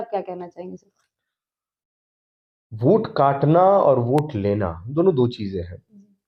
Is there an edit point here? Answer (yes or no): no